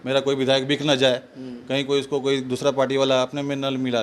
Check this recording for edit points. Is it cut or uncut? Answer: uncut